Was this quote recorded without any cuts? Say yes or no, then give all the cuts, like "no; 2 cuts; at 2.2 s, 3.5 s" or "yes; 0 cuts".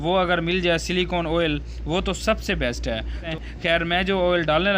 no; 1 cut; at 3.3 s